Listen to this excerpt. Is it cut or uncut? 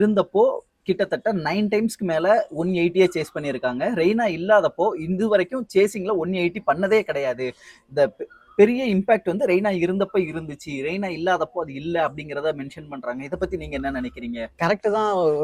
uncut